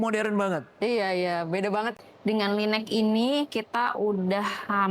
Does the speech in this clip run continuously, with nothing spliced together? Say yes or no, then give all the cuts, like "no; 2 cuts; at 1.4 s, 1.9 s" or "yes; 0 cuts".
no; 1 cut; at 1.9 s